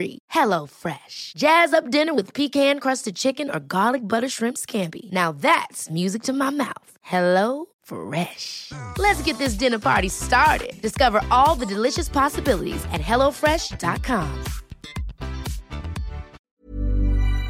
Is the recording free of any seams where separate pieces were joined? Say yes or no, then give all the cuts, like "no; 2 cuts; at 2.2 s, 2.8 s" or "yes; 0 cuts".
no; 1 cut; at 16.4 s